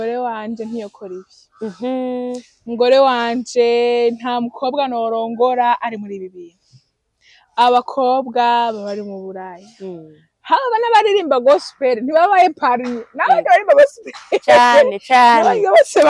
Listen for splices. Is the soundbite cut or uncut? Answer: uncut